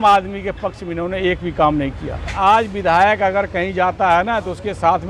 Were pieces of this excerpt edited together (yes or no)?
yes